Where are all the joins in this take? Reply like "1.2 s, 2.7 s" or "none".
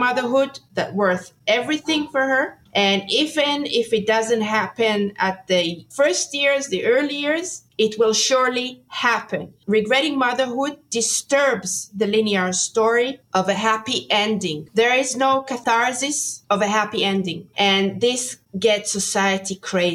14.6 s, 15.6 s

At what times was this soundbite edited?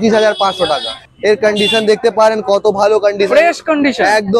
1.0 s

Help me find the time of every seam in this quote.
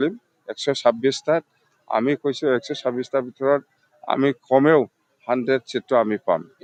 none

